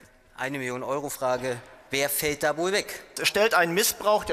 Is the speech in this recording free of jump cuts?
no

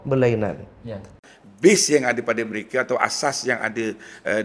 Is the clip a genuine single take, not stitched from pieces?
no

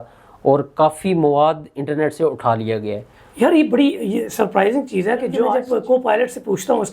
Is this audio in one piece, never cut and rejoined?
no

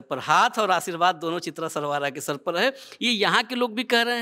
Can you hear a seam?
no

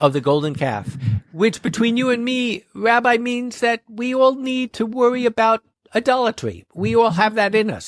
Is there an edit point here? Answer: no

